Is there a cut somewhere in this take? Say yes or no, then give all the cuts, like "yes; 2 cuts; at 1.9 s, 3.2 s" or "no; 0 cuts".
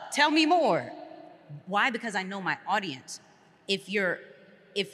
no; 0 cuts